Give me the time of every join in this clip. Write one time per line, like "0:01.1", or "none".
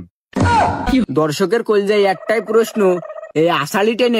0:01.0